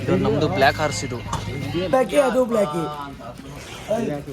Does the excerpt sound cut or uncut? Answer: cut